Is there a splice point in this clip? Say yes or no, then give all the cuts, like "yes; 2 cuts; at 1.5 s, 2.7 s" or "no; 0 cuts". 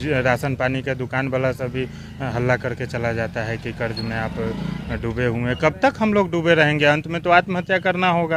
no; 0 cuts